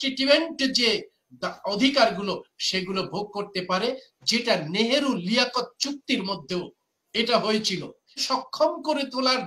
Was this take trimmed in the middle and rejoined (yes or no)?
yes